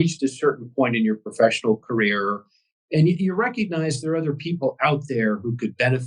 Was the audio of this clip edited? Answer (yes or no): no